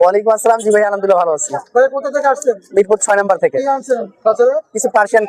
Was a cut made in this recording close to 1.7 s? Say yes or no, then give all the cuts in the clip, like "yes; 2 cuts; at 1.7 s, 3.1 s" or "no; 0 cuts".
no; 0 cuts